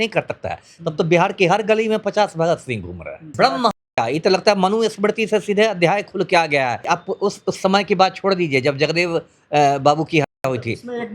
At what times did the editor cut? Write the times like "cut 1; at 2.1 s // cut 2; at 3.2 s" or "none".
cut 1; at 3.2 s // cut 2; at 6.8 s